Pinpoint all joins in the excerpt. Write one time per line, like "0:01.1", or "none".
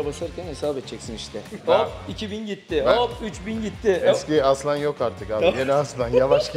0:01.6